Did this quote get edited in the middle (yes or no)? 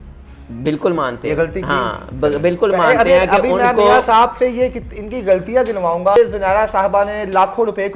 yes